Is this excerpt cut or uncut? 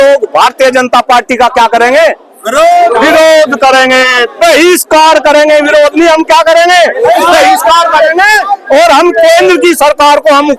uncut